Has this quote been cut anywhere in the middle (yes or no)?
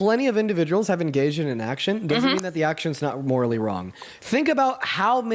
no